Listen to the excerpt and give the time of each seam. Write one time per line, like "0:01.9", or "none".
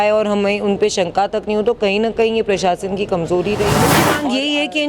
0:03.9